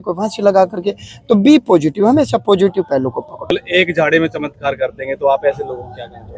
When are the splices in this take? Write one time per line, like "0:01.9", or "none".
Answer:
0:03.5

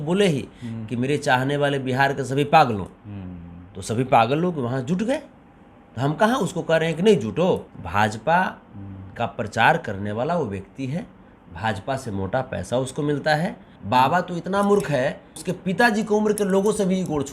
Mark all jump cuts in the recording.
0:07.8
0:13.7
0:15.4

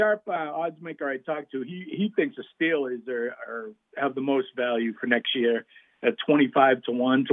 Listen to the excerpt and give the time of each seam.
none

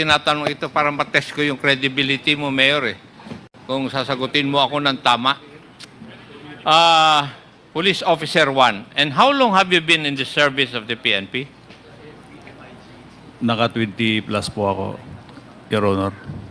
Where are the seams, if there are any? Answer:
none

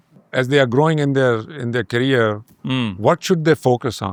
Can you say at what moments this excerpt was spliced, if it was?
none

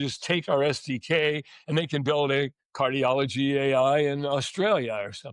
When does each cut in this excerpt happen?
none

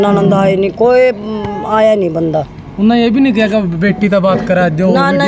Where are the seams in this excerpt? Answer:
none

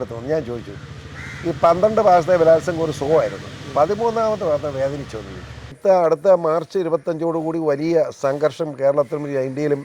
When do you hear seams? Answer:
0:05.8

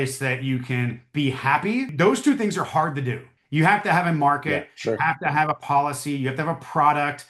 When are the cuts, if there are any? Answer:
0:01.9

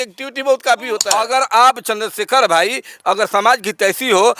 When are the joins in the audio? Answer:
0:01.1

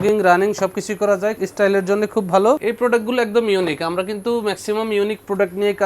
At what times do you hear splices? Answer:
0:01.4
0:02.6

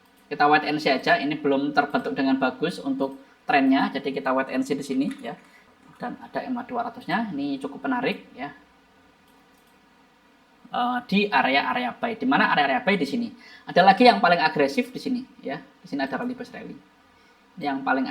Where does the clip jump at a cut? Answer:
0:05.7
0:10.6

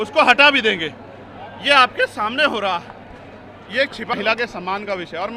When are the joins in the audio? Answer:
0:04.1

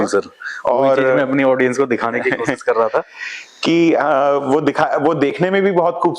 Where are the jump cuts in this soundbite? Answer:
none

